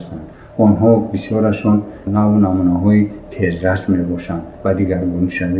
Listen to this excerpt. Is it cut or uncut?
cut